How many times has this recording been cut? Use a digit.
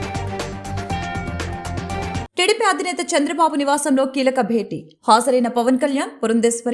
1